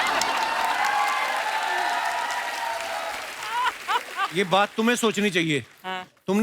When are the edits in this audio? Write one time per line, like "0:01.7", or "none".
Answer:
none